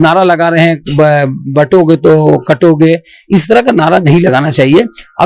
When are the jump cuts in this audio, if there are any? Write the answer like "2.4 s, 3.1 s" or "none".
none